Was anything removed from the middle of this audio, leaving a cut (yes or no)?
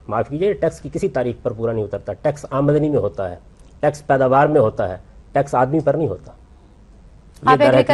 no